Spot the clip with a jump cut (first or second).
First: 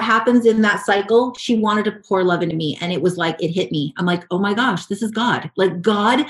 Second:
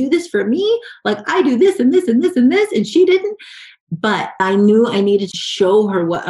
second